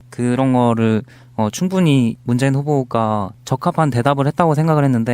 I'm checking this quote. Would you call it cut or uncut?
uncut